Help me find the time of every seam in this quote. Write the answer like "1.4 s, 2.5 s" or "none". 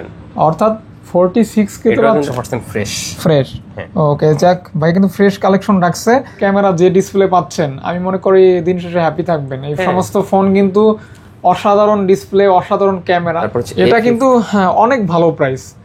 2.3 s, 6.4 s, 13.4 s